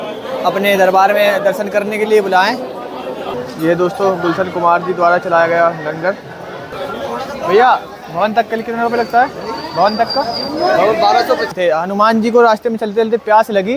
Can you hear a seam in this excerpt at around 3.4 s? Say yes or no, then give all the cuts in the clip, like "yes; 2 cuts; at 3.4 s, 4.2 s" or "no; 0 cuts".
yes; 3 cuts; at 3.4 s, 6.7 s, 11.5 s